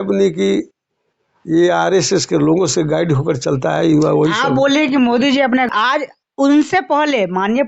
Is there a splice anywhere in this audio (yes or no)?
yes